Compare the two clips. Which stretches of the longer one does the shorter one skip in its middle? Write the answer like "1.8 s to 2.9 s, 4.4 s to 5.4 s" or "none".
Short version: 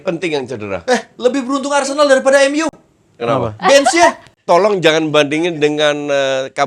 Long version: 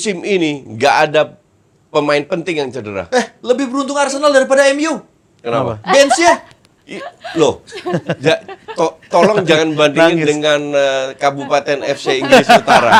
6.6 s to 9.0 s

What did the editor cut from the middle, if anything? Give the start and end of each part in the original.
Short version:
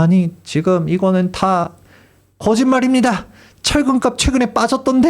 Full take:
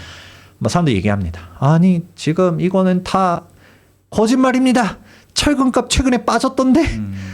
none

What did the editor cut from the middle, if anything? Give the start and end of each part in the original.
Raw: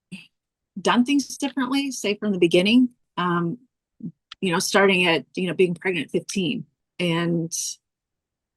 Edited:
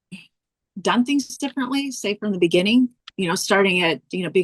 3.0 s to 4.3 s

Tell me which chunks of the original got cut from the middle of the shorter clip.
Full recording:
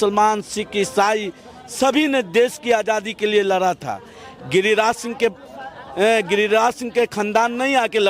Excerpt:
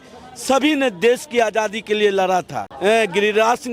3.9 s to 5.8 s

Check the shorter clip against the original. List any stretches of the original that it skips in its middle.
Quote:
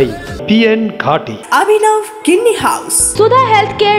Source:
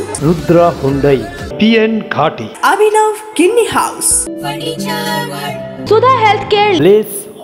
4.1 s to 5.7 s

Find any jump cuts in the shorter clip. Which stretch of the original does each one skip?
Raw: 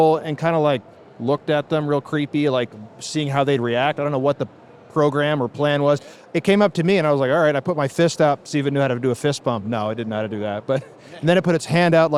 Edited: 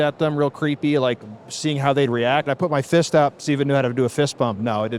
4.0 s to 7.5 s

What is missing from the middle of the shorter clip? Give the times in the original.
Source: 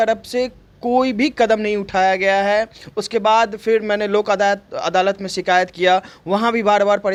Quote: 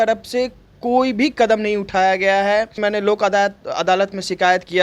2.8 s to 3.8 s

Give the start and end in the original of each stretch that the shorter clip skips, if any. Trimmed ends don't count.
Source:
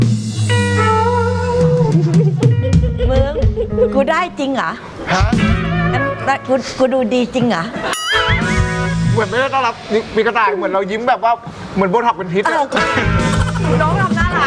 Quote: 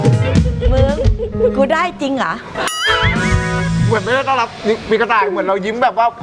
4.9 s to 7.8 s

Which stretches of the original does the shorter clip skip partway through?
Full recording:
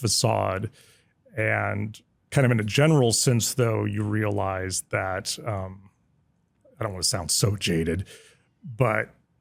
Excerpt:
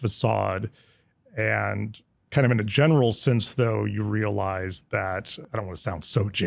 5.3 s to 6.6 s

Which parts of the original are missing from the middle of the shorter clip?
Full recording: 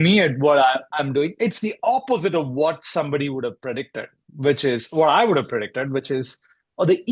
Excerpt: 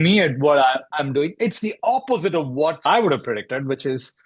2.9 s to 5.1 s

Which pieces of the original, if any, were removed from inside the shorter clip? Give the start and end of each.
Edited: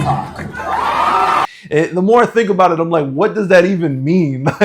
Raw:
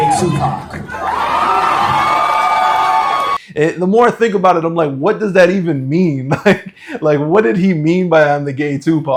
1.8 s to 3.3 s

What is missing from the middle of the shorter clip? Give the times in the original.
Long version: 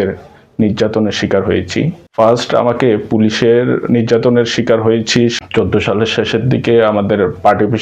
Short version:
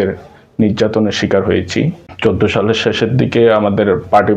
2.1 s to 5.4 s

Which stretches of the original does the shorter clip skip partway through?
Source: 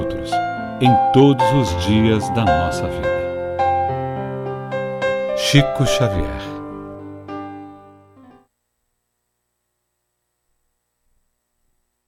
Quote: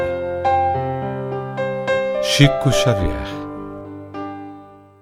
none

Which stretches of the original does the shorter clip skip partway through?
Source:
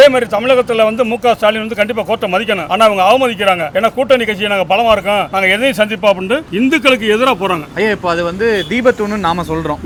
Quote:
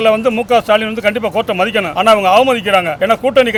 none

